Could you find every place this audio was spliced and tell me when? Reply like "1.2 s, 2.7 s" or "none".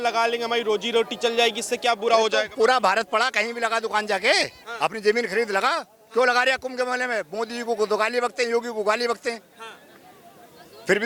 none